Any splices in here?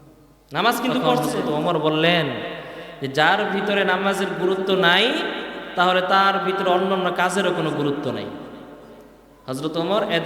yes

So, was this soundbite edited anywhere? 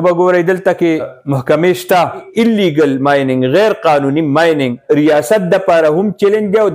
yes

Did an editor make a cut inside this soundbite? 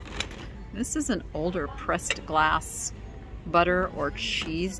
no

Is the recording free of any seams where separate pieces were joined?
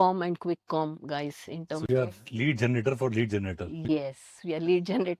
yes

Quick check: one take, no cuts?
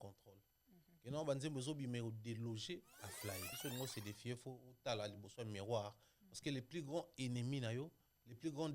no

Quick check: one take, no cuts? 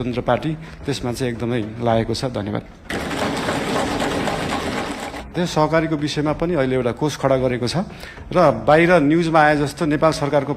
no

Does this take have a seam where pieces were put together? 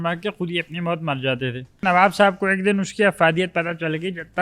yes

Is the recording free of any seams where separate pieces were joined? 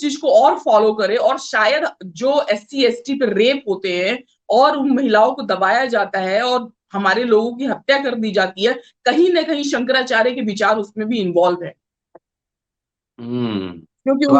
yes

